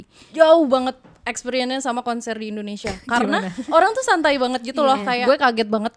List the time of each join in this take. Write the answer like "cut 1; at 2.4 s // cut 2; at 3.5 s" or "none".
cut 1; at 3.6 s // cut 2; at 5.2 s